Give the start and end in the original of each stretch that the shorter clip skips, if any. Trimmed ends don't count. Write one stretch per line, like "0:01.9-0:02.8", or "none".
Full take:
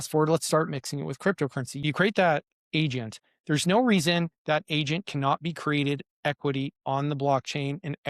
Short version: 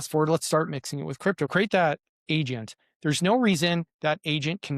0:01.5-0:01.9